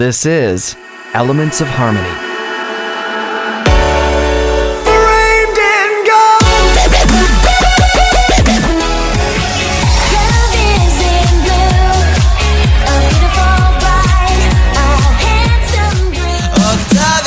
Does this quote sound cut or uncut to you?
uncut